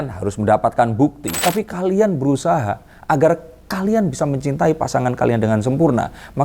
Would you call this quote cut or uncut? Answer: cut